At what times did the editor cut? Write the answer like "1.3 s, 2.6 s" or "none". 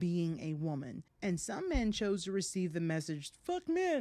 none